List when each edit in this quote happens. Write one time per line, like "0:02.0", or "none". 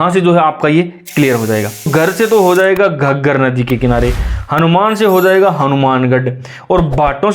0:01.9